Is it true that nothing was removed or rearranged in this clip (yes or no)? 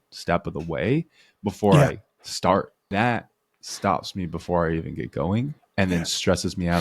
no